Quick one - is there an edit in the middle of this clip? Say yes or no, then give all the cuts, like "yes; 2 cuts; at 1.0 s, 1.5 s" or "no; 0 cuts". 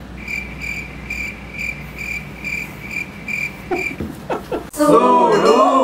no; 0 cuts